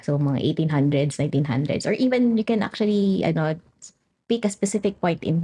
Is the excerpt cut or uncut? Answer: uncut